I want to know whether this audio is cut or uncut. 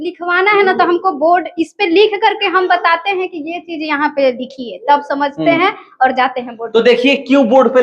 uncut